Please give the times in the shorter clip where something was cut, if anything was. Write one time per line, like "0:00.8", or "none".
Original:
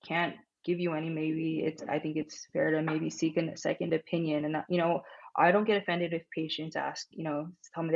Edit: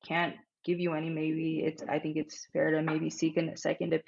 none